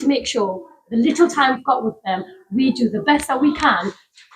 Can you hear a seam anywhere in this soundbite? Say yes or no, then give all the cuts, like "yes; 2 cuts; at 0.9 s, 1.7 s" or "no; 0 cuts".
yes; 1 cut; at 1.6 s